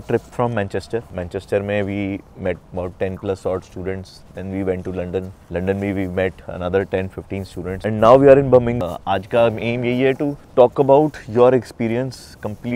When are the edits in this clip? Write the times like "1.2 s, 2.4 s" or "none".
1.1 s, 8.8 s